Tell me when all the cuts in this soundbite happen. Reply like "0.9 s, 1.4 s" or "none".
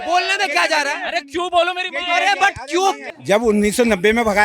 3.1 s